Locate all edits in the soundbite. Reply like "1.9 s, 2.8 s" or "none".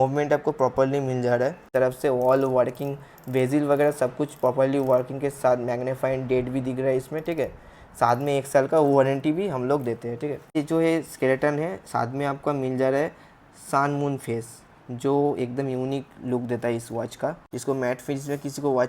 1.6 s, 10.6 s, 17.4 s